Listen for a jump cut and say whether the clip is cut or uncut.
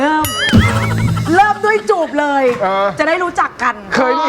uncut